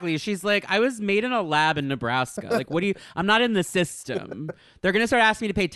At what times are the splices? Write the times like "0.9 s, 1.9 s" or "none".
none